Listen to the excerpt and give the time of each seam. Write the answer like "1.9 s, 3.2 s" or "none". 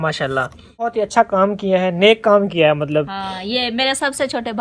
0.9 s